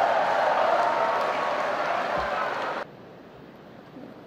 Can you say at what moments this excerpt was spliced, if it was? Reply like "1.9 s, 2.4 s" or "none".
2.8 s